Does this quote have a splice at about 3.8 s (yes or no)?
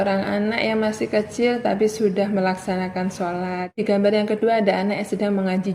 yes